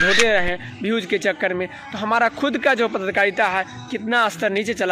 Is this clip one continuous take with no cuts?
yes; 0 cuts

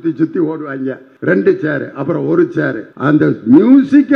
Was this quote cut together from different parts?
yes; 2 cuts; at 1.1 s, 2.9 s

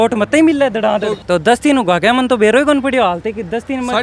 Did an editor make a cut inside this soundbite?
yes; 1 cut; at 1.2 s

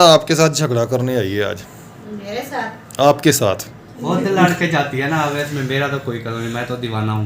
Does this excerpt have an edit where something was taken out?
yes; 1 cut; at 4.0 s

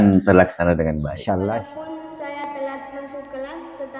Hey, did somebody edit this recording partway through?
yes; 1 cut; at 1.7 s

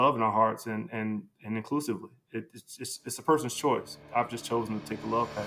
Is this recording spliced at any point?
yes; 1 cut; at 4.0 s

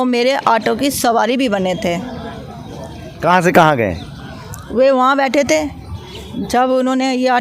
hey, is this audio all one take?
yes; 0 cuts

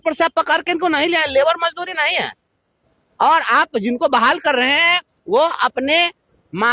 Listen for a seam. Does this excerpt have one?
no; 0 cuts

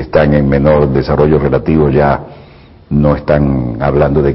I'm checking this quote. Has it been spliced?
yes; 1 cut; at 2.0 s

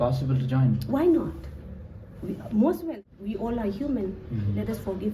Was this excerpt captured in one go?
no; 1 cut; at 2.9 s

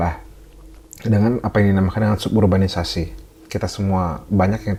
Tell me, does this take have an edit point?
no; 0 cuts

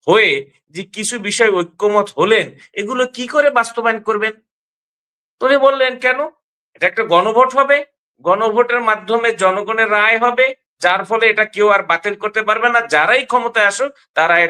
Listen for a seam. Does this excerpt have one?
no; 0 cuts

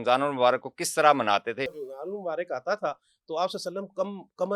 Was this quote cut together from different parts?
yes; 1 cut; at 1.7 s

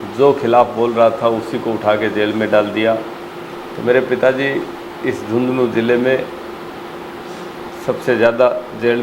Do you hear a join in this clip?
no; 0 cuts

